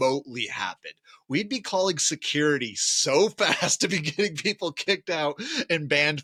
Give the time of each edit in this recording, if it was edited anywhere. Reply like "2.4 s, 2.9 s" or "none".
none